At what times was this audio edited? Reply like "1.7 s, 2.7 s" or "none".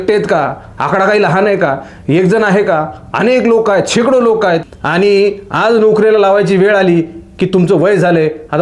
4.7 s